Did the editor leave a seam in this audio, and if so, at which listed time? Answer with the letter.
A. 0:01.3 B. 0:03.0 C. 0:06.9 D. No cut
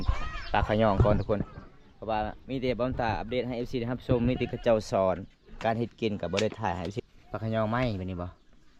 C